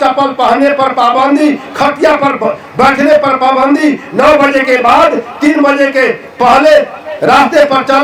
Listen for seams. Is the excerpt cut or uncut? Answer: uncut